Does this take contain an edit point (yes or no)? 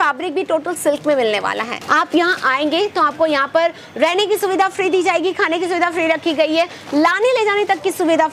yes